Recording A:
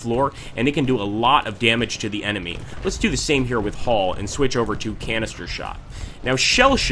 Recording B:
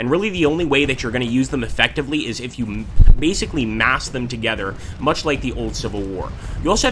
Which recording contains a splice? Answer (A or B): B